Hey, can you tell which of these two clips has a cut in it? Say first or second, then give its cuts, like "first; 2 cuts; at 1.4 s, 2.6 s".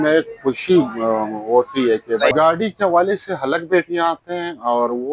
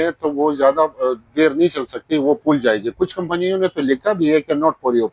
first; 1 cut; at 2.3 s